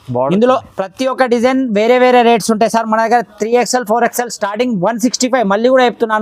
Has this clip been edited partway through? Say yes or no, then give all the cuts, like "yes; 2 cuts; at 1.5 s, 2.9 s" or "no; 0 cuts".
no; 0 cuts